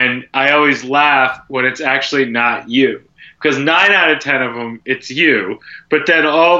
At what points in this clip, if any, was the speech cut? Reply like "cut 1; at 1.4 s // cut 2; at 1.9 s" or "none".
none